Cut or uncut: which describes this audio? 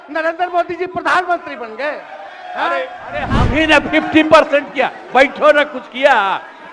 cut